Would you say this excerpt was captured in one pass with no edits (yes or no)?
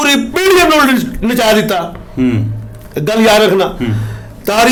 yes